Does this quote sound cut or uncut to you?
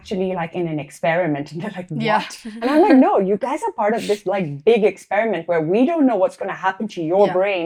uncut